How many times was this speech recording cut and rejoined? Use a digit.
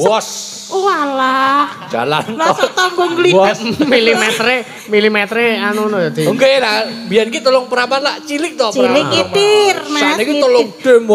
0